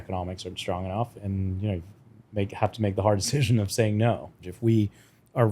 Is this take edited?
yes; 2 cuts; at 1.1 s, 4.5 s

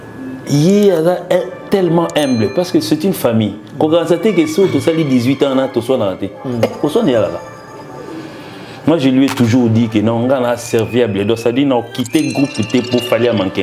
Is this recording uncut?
yes; 0 cuts

